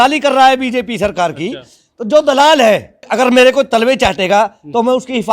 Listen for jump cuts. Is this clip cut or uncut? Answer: cut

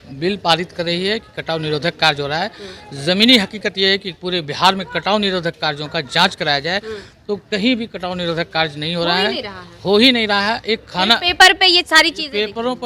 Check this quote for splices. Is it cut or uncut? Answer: uncut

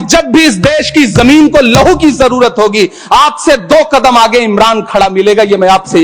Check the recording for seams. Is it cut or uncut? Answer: uncut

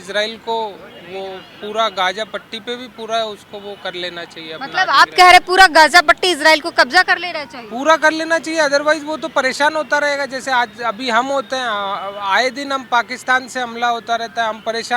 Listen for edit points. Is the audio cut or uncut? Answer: uncut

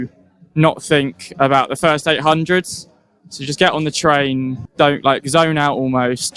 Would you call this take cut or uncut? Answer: uncut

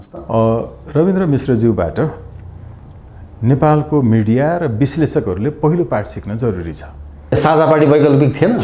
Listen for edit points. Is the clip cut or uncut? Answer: cut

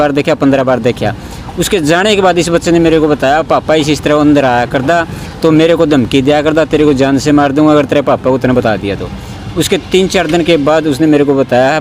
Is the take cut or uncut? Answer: uncut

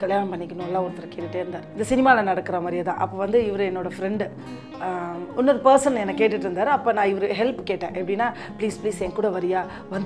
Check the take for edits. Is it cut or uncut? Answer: cut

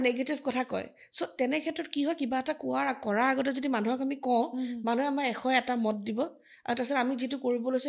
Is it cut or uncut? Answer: uncut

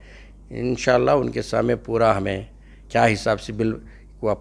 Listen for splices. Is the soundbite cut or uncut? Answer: uncut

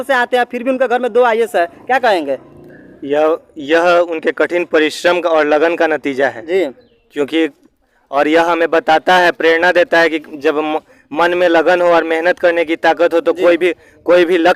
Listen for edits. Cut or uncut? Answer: uncut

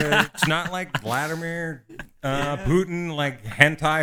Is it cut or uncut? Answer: uncut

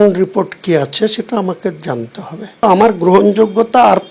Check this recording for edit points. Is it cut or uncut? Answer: cut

